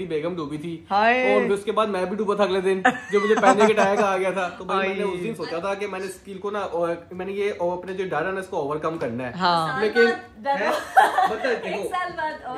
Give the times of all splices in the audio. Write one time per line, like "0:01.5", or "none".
none